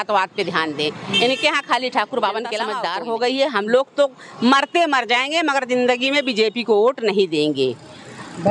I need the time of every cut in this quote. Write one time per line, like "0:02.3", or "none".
0:02.8